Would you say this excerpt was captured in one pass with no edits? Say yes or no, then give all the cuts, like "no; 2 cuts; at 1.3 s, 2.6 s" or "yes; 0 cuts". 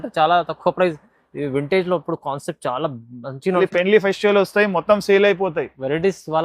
no; 1 cut; at 3.6 s